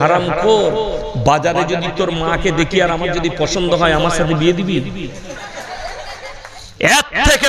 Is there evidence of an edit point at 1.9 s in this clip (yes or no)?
no